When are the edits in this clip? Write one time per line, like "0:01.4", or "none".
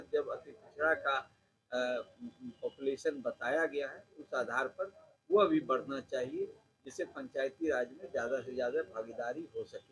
none